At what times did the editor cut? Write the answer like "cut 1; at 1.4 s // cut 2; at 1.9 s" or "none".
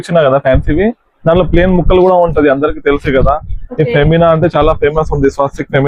none